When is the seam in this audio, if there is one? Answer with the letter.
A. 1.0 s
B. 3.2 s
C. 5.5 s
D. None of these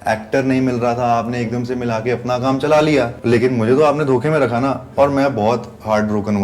B